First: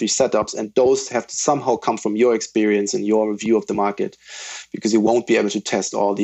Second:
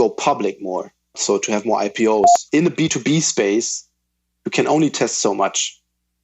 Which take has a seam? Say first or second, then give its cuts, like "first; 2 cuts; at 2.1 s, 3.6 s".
second; 2 cuts; at 1.2 s, 2.4 s